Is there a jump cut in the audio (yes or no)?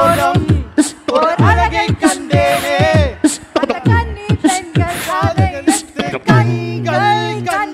no